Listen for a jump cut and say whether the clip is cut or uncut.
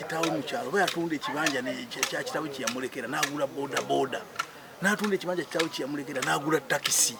uncut